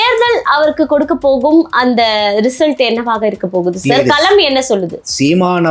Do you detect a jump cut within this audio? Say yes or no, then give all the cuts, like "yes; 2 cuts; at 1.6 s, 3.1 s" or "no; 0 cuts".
no; 0 cuts